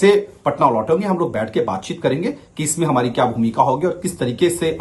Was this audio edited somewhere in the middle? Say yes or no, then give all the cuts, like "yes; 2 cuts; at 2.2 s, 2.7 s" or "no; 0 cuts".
no; 0 cuts